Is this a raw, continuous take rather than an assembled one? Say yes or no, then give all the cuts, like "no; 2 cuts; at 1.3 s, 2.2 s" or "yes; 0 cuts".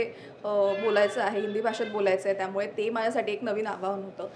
yes; 0 cuts